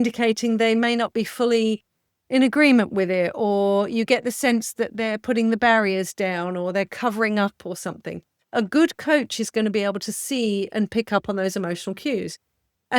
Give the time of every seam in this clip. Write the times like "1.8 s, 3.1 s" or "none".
none